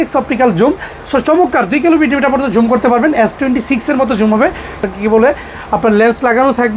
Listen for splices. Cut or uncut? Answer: cut